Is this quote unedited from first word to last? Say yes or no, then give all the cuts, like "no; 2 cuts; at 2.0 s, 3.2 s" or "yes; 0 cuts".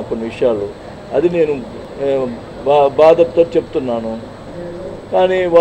yes; 0 cuts